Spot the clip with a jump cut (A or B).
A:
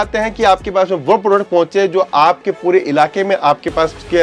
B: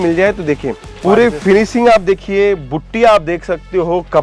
B